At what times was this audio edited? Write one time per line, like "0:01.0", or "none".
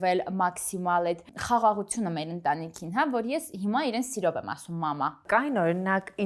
0:01.3
0:05.2